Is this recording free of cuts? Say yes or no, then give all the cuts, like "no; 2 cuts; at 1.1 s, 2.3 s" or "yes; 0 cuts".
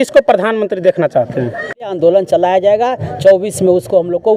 no; 1 cut; at 1.9 s